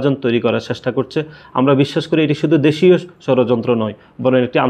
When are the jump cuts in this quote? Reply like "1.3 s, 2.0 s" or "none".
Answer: none